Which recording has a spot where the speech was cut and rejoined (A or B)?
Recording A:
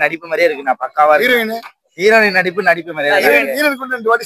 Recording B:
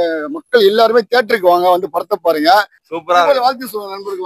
B